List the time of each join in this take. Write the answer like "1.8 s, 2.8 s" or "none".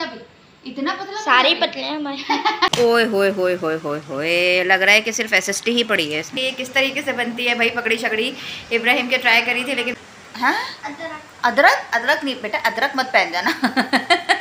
2.8 s, 6.3 s, 9.9 s, 13.6 s